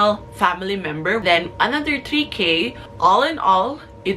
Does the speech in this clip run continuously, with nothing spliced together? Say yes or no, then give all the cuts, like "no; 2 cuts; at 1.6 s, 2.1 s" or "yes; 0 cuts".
no; 2 cuts; at 1.2 s, 2.8 s